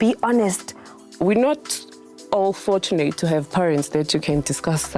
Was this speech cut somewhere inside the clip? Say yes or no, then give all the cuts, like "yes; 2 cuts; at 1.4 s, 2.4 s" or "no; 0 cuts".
yes; 1 cut; at 1.1 s